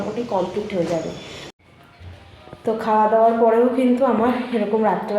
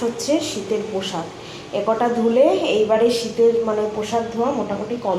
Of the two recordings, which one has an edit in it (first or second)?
first